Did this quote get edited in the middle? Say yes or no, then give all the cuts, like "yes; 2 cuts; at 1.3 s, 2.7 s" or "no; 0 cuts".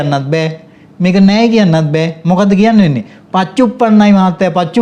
no; 0 cuts